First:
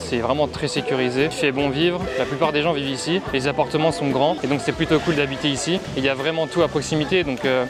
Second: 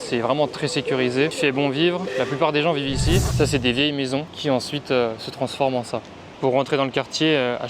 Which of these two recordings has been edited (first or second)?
second